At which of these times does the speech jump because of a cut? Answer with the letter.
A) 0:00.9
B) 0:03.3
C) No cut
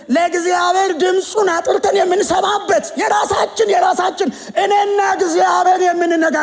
C